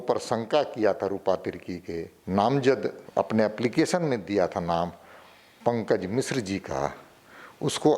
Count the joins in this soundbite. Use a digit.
2